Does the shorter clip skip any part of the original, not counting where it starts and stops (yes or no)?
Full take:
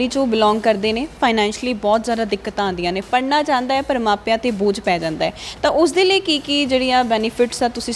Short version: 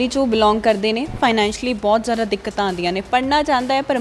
no